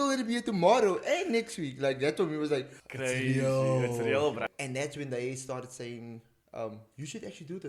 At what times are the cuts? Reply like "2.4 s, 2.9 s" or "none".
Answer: 2.8 s, 4.4 s